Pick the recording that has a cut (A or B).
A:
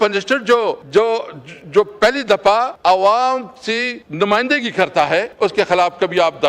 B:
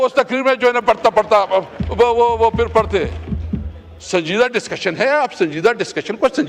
A